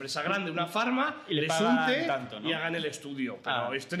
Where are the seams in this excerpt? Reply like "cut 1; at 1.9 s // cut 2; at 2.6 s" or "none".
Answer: none